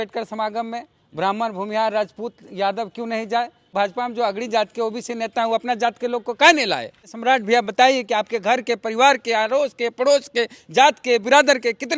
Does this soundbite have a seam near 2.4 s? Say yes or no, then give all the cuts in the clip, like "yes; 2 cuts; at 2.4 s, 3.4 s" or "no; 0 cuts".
no; 2 cuts; at 3.7 s, 7.1 s